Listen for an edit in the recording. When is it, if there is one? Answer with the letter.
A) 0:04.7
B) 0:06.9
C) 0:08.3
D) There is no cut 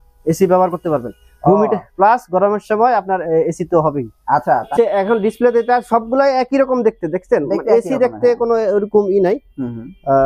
A